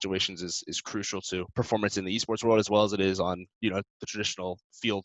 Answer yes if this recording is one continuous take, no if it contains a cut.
no